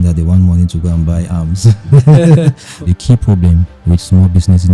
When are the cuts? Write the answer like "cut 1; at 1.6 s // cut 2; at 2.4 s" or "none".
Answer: cut 1; at 2.8 s